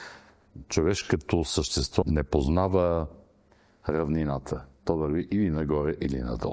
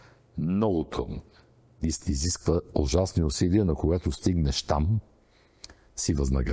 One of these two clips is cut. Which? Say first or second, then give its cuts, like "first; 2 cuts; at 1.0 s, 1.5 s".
first; 1 cut; at 2.0 s